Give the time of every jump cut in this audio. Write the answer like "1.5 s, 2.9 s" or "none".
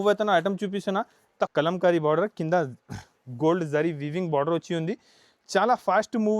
1.5 s